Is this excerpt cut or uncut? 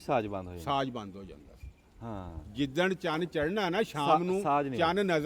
uncut